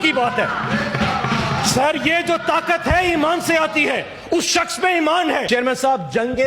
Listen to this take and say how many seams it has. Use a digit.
1